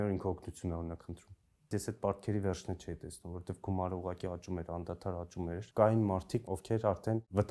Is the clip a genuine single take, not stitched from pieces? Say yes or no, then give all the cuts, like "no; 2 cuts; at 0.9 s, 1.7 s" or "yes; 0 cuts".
no; 3 cuts; at 1.7 s, 5.6 s, 6.6 s